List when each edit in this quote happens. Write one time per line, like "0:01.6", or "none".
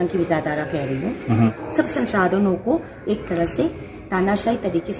0:01.5